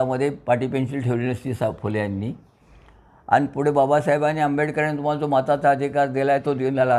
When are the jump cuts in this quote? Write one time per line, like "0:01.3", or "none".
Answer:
none